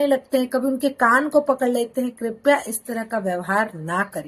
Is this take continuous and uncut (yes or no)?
yes